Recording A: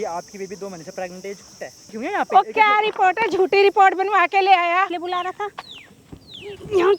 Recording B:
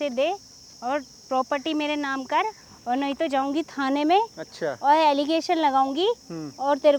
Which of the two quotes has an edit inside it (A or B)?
A